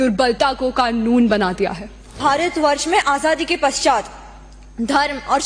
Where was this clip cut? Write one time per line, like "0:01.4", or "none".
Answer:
0:02.2